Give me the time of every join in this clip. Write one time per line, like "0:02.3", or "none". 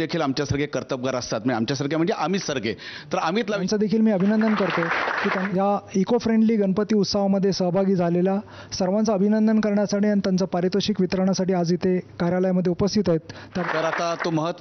0:03.6
0:05.4
0:13.6